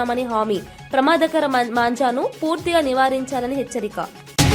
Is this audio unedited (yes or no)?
yes